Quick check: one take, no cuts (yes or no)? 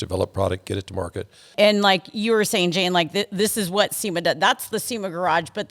no